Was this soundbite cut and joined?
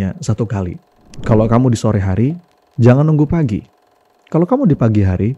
yes; 1 cut; at 1.1 s

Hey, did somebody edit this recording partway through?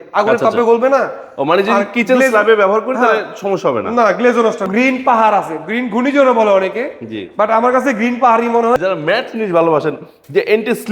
yes; 2 cuts; at 4.7 s, 8.8 s

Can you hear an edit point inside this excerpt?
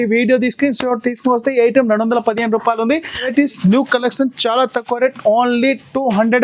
yes; 1 cut; at 3.3 s

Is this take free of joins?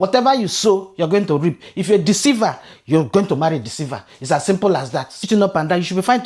no; 1 cut; at 5.2 s

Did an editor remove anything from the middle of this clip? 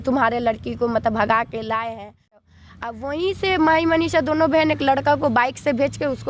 yes; 1 cut; at 2.4 s

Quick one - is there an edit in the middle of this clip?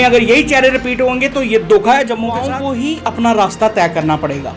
yes; 1 cut; at 2.5 s

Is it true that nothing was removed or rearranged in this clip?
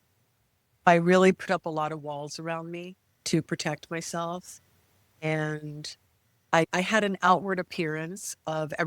no; 2 cuts; at 0.9 s, 6.7 s

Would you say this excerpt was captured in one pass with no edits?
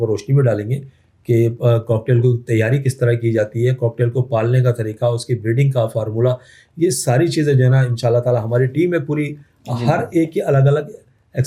yes; 0 cuts

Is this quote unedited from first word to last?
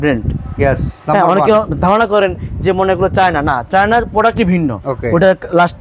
no; 1 cut; at 4.9 s

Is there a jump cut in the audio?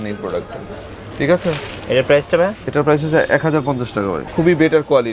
yes; 1 cut; at 4.2 s

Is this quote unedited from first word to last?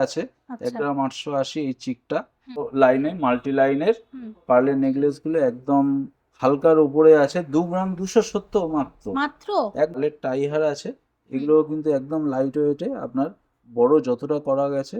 no; 2 cuts; at 2.7 s, 10.0 s

